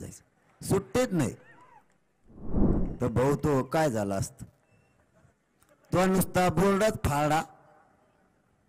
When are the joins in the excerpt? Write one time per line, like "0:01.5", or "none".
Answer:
0:02.5